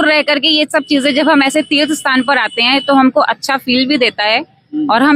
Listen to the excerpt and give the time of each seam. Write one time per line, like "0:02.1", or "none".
none

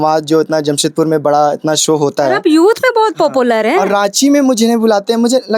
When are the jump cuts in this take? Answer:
none

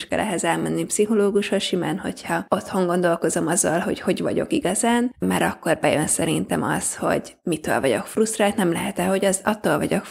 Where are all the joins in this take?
0:05.2

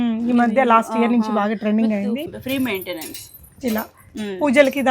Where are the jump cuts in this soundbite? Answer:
0:02.3

